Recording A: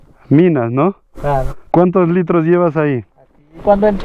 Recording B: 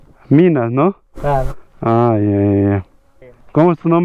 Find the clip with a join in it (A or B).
A